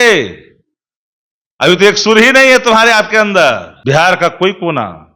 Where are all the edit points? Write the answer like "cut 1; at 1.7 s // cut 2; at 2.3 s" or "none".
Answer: cut 1; at 3.7 s

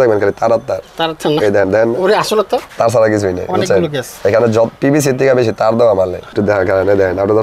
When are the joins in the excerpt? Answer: cut 1; at 2.7 s // cut 2; at 6.3 s

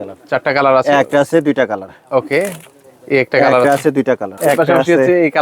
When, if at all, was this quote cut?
cut 1; at 4.3 s

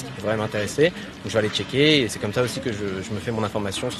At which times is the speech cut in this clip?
none

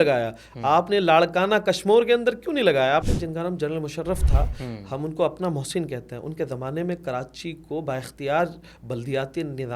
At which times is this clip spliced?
cut 1; at 3.1 s

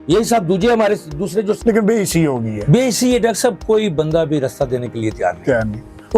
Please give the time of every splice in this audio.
cut 1; at 1.6 s

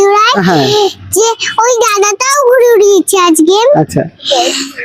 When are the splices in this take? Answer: none

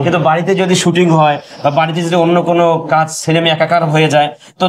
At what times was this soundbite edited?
none

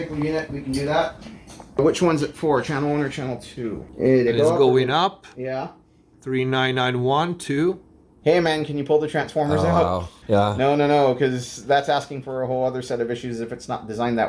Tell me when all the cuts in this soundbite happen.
cut 1; at 1.8 s // cut 2; at 3.8 s // cut 3; at 8.1 s // cut 4; at 10.1 s

